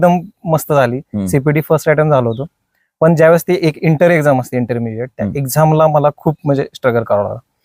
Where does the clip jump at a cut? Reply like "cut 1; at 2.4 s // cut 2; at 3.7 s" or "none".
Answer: none